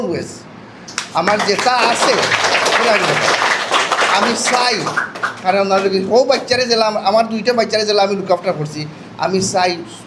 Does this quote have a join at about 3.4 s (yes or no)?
no